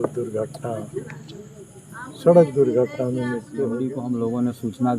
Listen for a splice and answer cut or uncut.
cut